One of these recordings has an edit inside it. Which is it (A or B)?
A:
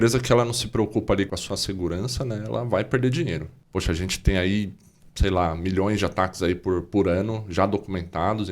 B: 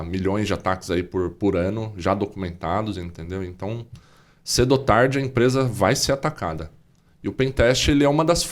A